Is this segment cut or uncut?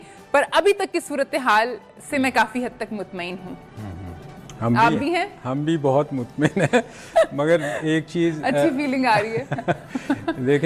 uncut